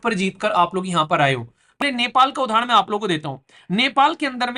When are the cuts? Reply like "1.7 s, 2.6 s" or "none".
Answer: 1.8 s